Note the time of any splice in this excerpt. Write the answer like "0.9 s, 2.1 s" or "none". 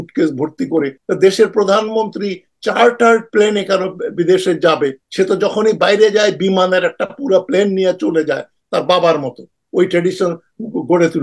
1.0 s, 5.0 s